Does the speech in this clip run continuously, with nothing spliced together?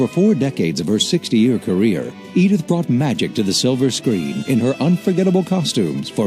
no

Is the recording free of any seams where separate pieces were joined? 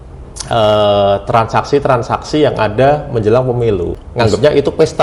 no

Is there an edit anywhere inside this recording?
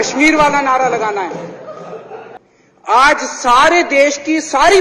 yes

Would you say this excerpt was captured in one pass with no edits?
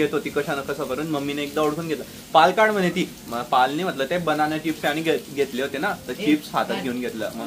yes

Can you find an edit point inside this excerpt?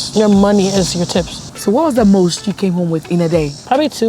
yes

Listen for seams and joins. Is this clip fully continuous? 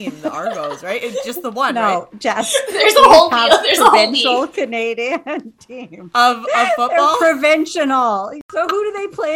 yes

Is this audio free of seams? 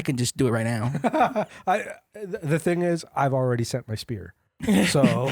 yes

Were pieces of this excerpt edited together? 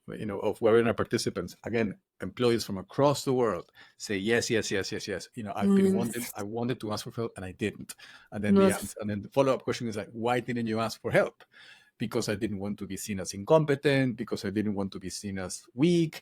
no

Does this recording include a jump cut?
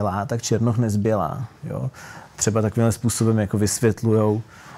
no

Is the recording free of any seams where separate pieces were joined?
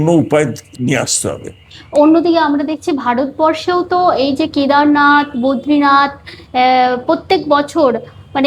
yes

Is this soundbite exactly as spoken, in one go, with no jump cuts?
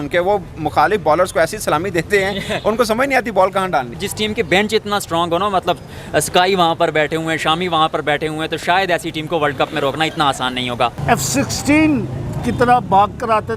no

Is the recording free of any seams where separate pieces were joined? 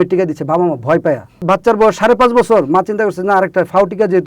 no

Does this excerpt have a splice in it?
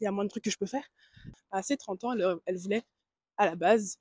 yes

